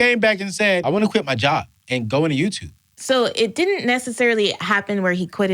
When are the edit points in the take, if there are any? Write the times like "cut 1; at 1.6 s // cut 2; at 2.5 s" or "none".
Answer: cut 1; at 1.0 s // cut 2; at 2.9 s